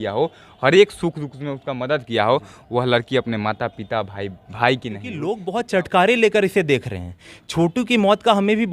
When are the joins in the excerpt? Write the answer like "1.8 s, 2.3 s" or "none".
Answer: 5.3 s